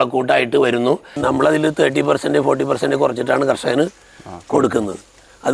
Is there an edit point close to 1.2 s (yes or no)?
yes